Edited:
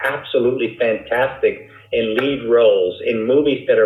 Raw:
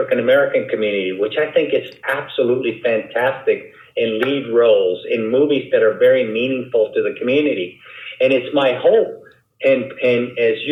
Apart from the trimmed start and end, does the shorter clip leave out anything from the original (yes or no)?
no